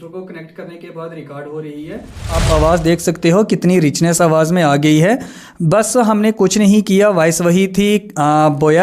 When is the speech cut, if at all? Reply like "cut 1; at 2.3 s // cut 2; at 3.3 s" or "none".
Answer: cut 1; at 2.4 s